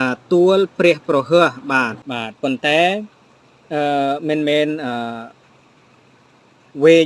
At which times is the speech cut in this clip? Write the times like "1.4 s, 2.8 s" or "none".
2.0 s